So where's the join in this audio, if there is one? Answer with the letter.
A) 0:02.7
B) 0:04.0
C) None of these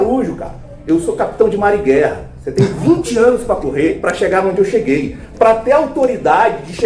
B